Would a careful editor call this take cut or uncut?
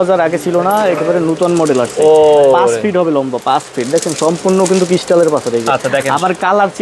uncut